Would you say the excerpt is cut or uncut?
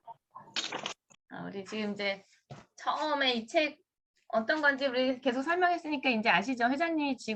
cut